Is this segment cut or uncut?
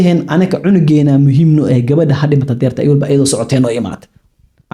uncut